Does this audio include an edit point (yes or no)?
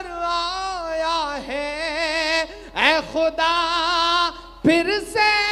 no